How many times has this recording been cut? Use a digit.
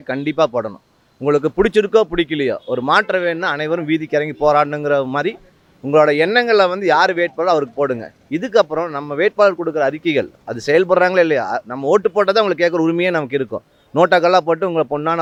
0